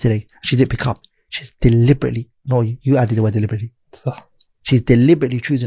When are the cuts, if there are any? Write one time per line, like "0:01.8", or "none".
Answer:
none